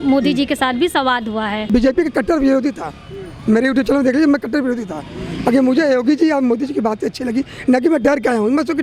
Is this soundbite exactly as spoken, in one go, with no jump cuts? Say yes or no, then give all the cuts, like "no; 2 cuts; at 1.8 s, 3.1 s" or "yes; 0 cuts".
no; 1 cut; at 1.6 s